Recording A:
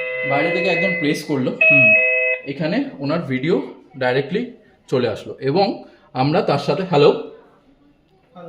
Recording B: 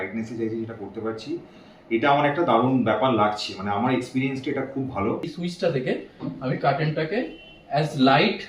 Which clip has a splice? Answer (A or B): B